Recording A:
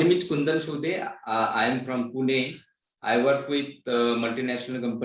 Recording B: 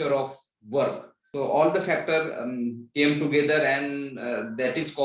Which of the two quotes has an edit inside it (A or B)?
B